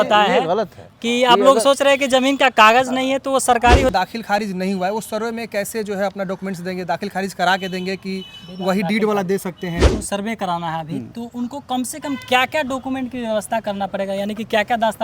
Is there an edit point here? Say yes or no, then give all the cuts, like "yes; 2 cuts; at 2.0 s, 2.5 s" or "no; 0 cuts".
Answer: yes; 2 cuts; at 3.9 s, 9.9 s